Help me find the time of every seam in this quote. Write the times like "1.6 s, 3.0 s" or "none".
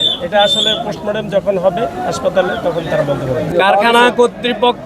3.5 s